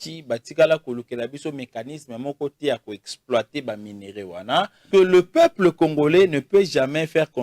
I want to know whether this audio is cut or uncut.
cut